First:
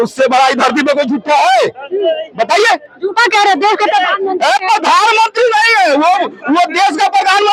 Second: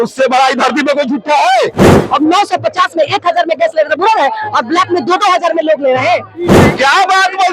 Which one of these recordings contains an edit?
second; 2 cuts; at 2.0 s, 6.5 s

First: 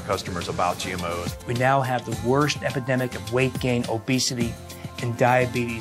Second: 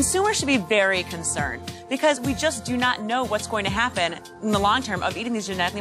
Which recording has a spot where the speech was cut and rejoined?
first; 1 cut; at 1.3 s

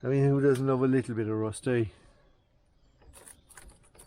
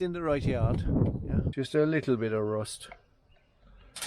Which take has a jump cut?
second; 1 cut; at 1.5 s

